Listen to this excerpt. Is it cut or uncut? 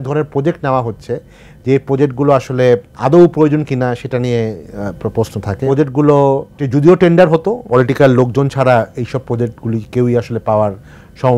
cut